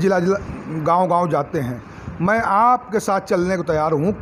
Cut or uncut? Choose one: uncut